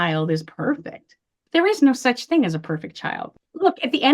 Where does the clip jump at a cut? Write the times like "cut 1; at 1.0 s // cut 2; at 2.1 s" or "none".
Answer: cut 1; at 1.4 s // cut 2; at 3.3 s

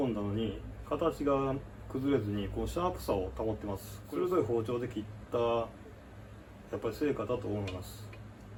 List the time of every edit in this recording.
none

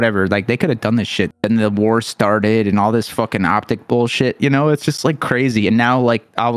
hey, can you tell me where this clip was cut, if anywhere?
cut 1; at 1.3 s

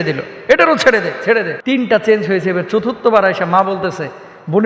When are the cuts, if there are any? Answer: cut 1; at 1.5 s

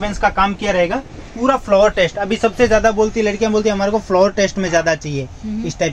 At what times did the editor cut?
none

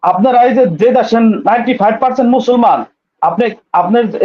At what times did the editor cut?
none

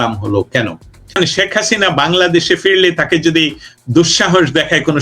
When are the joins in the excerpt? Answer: cut 1; at 1.1 s

